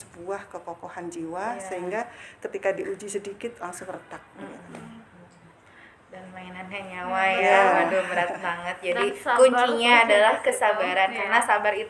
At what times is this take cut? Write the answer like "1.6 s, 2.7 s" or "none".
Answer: none